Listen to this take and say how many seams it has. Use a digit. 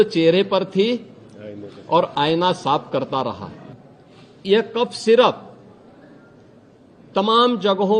1